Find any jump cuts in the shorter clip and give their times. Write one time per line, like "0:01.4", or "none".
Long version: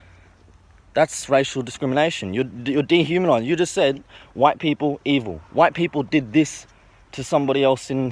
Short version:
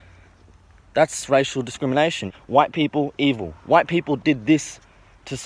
0:02.2